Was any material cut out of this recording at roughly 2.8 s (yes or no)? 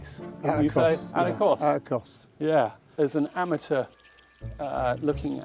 yes